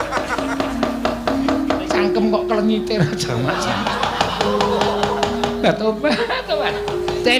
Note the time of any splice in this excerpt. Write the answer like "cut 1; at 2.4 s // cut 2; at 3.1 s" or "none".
none